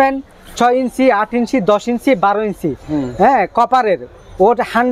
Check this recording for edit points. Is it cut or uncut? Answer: uncut